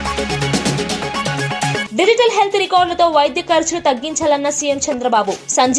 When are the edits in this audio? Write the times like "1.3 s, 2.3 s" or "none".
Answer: 1.8 s